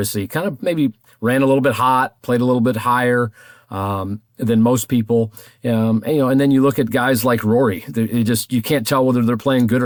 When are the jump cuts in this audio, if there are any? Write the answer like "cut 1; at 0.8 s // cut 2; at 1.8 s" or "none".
none